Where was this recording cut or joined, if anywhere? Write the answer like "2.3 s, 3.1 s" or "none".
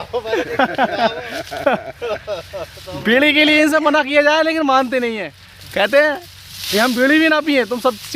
none